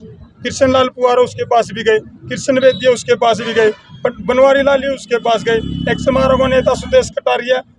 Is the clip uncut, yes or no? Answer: yes